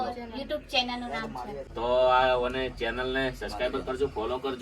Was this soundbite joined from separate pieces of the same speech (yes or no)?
yes